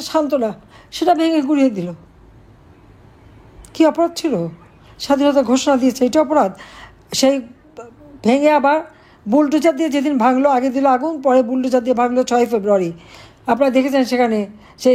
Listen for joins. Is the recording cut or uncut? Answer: uncut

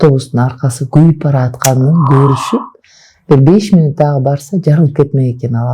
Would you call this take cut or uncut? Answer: uncut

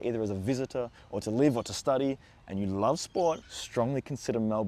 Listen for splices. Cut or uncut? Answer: uncut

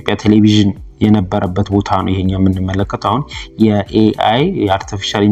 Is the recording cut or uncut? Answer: uncut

